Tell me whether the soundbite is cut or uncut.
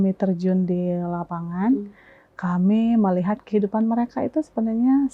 uncut